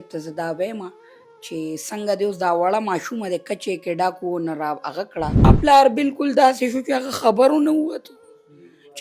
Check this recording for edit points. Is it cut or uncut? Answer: cut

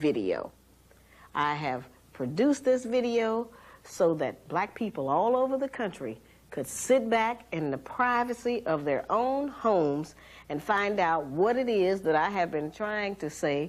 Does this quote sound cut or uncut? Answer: uncut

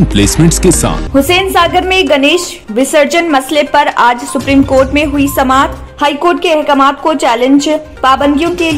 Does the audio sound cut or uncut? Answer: cut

